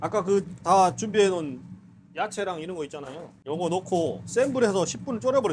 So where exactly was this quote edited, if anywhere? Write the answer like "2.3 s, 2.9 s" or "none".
3.3 s